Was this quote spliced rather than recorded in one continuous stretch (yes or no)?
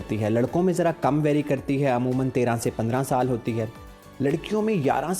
no